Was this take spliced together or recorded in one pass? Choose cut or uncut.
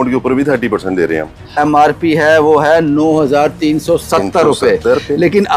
cut